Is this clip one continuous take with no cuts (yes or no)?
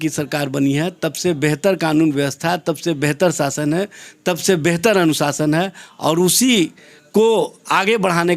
yes